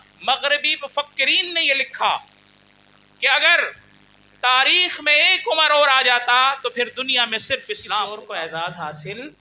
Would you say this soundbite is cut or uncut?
cut